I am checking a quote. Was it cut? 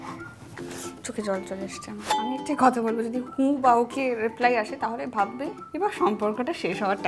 yes; 1 cut; at 2.0 s

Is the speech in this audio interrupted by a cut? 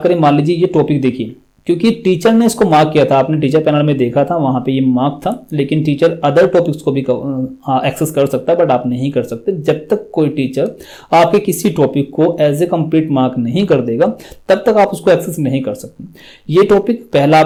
no; 0 cuts

